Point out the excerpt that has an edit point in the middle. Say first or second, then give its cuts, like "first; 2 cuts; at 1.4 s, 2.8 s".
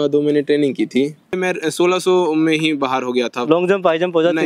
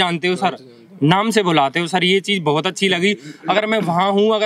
first; 1 cut; at 1.3 s